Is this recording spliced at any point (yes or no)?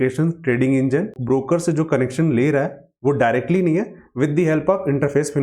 yes